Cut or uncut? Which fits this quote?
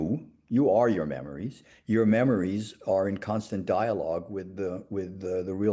uncut